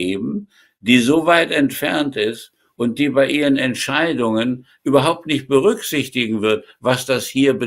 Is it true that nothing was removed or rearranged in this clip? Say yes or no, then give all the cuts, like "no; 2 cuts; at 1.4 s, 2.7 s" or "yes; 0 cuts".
yes; 0 cuts